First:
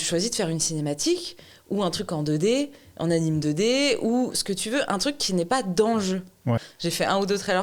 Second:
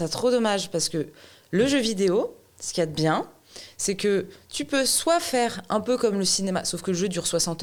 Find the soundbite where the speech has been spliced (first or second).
first